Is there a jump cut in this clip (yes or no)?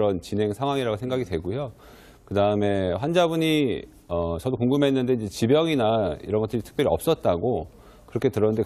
yes